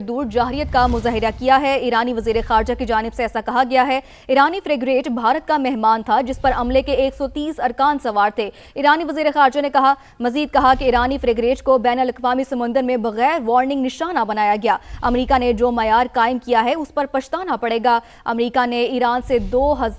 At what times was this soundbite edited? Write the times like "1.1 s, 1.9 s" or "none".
none